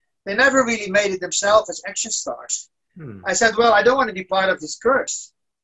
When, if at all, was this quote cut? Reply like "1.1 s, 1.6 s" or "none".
none